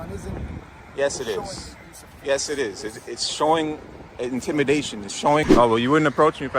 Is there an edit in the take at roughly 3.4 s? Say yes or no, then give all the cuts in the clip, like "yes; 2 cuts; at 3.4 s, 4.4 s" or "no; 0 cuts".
no; 1 cut; at 5.4 s